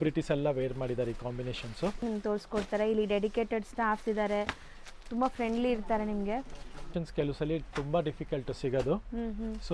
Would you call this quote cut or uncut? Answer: cut